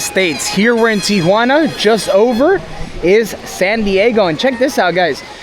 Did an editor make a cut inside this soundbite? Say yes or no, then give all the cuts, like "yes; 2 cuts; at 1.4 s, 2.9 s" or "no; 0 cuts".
no; 0 cuts